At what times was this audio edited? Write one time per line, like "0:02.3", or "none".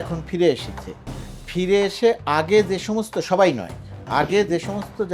none